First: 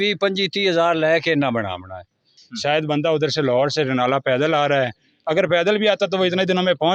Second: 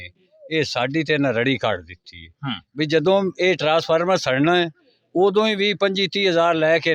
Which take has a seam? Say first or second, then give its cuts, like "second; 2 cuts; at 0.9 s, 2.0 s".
first; 1 cut; at 2.4 s